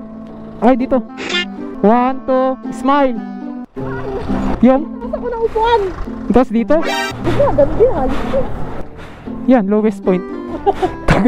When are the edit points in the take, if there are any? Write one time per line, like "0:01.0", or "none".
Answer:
0:01.6
0:04.5
0:07.1

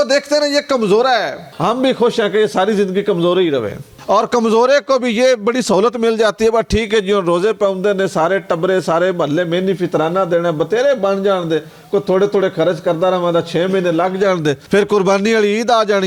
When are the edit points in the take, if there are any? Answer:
none

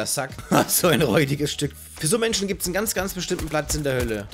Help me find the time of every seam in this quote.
none

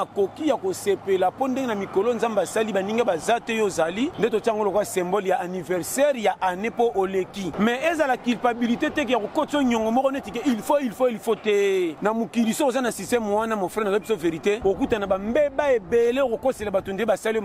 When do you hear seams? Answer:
0:04.1
0:07.5
0:12.0
0:14.6

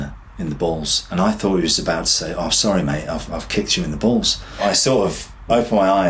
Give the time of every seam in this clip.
0:01.0

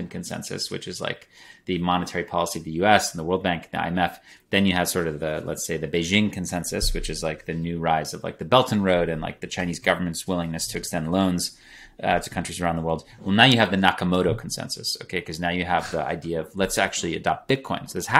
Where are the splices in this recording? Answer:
none

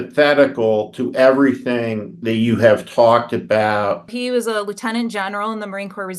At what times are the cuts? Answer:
0:04.1

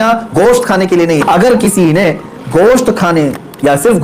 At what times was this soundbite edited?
0:01.2

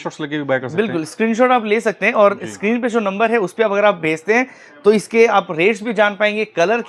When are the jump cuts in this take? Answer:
none

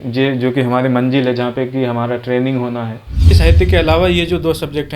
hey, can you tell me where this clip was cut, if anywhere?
0:03.3

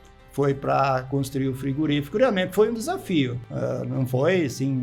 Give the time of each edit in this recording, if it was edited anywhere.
0:03.4

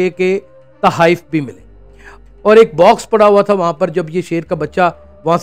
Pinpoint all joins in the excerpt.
0:02.1

